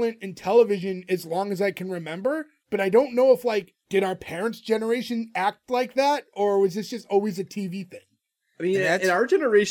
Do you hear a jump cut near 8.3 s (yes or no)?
no